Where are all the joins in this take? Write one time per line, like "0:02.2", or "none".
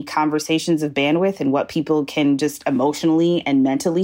none